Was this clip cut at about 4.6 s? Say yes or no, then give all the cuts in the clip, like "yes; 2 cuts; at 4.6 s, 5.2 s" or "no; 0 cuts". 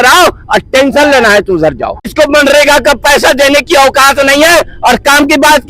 no; 1 cut; at 2.1 s